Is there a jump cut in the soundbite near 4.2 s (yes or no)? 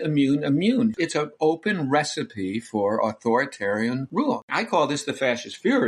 yes